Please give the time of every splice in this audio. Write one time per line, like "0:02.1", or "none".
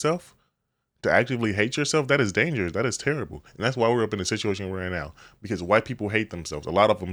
none